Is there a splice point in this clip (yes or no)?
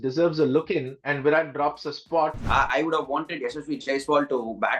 yes